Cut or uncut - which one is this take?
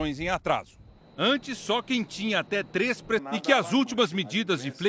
uncut